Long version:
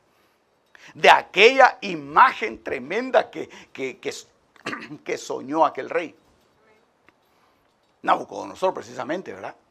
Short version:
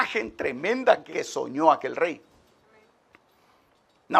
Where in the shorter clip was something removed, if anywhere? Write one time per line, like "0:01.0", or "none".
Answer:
0:01.1